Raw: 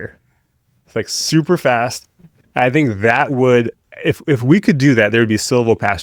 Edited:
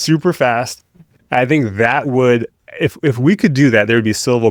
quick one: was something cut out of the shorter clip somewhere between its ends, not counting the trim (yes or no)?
no